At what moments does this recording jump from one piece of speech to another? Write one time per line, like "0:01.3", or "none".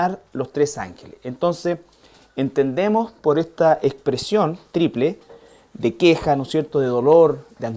0:03.3